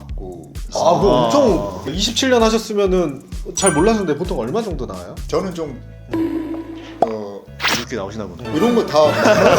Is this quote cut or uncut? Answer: cut